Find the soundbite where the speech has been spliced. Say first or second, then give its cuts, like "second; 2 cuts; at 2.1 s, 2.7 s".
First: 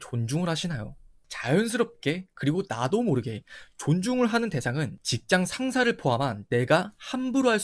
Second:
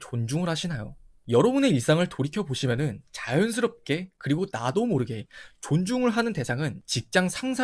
first; 1 cut; at 1.2 s